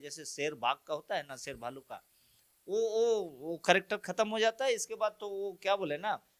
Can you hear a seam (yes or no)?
no